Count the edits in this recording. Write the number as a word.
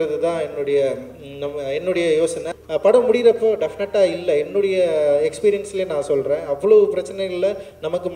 one